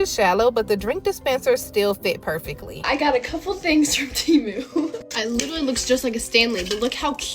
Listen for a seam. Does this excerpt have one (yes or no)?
yes